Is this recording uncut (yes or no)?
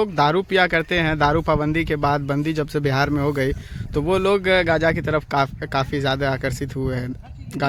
yes